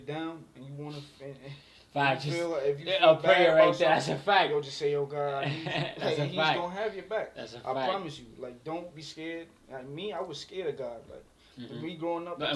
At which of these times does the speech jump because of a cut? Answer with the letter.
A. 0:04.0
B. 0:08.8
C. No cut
C